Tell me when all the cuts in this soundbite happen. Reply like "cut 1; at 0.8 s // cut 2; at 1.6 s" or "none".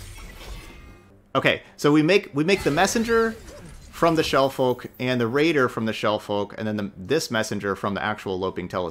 cut 1; at 1.1 s